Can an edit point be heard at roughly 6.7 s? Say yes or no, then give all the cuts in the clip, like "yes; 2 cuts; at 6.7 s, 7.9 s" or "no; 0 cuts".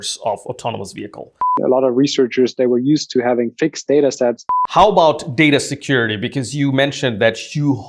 no; 2 cuts; at 1.6 s, 4.5 s